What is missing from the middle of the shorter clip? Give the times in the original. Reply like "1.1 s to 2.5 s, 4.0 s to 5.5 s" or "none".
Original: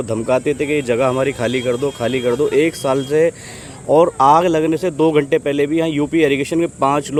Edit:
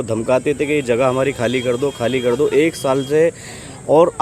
none